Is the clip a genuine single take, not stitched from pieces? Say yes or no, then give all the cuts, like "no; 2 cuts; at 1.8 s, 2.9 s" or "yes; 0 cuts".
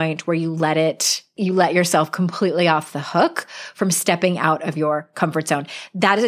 no; 1 cut; at 1.3 s